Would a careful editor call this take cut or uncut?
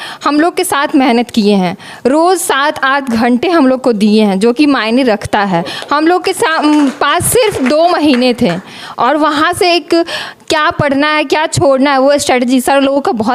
uncut